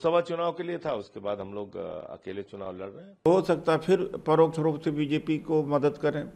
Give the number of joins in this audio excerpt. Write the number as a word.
one